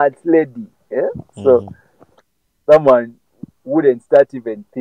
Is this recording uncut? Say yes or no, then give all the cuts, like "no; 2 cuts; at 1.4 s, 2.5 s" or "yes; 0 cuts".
yes; 0 cuts